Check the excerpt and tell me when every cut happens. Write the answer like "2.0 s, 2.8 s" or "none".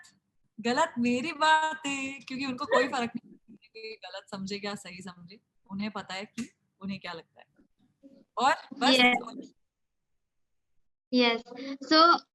none